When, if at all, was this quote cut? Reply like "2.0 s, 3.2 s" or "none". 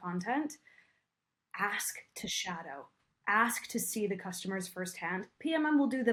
none